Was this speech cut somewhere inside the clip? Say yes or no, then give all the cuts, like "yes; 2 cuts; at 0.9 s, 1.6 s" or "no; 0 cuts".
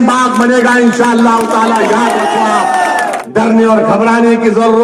yes; 1 cut; at 3.2 s